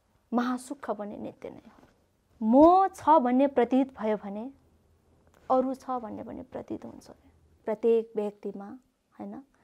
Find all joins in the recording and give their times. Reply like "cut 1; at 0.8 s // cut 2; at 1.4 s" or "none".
cut 1; at 2.2 s // cut 2; at 7.6 s